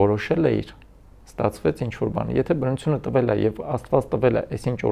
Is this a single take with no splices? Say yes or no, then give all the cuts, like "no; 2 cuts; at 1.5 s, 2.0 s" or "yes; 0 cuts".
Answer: yes; 0 cuts